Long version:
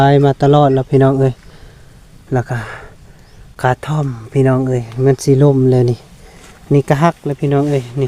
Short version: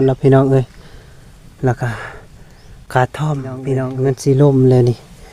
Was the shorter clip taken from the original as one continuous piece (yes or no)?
no